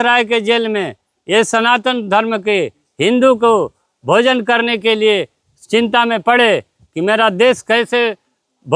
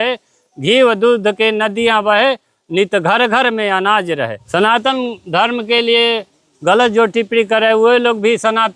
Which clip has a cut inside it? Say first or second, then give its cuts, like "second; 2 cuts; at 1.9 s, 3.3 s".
second; 1 cut; at 4.4 s